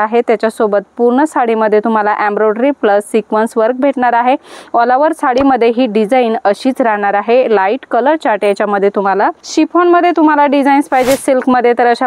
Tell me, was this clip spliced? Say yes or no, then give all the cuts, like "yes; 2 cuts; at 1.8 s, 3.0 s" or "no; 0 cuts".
no; 0 cuts